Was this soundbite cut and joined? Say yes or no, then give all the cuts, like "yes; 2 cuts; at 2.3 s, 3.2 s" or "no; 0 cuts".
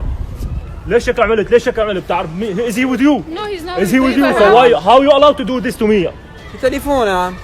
no; 0 cuts